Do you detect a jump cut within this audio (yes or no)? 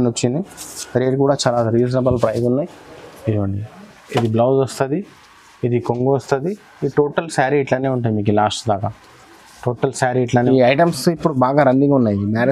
yes